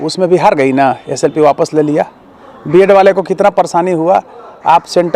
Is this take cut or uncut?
uncut